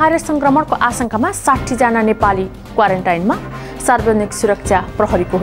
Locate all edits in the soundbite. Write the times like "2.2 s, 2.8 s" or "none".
none